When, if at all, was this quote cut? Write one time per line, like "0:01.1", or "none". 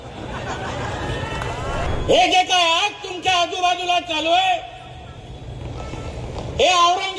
0:01.9